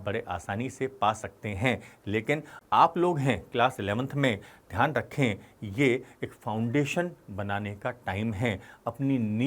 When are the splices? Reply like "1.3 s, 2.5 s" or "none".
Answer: 2.6 s